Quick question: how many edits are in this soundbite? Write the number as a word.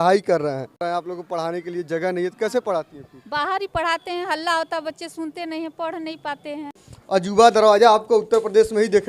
two